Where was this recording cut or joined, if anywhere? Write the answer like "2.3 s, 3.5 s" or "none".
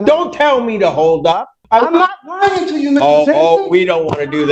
1.6 s